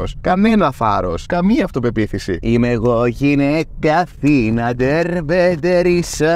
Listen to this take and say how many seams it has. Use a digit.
1